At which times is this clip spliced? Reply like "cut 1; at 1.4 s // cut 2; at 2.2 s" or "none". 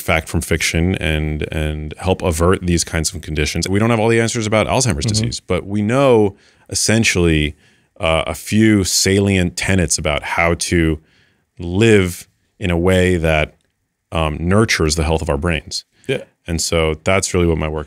cut 1; at 3.7 s